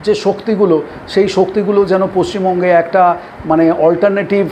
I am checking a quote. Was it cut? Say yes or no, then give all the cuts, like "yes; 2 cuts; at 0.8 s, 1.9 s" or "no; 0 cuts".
no; 0 cuts